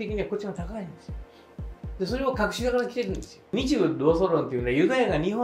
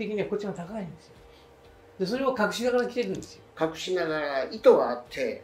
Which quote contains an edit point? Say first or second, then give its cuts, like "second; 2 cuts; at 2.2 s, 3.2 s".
first; 1 cut; at 3.5 s